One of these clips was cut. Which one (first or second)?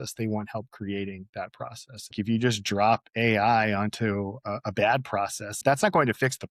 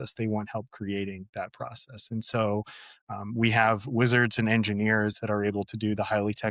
first